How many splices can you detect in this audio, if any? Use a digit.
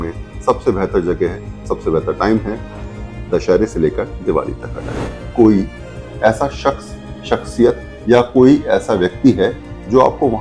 1